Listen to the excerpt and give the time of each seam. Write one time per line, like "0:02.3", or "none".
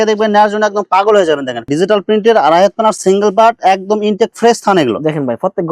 0:01.6